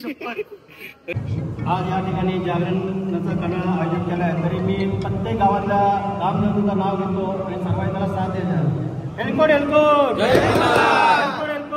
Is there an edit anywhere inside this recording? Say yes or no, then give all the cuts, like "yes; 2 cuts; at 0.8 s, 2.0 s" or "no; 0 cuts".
yes; 1 cut; at 1.1 s